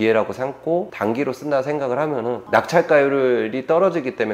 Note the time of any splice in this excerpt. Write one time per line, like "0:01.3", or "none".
0:00.9
0:02.4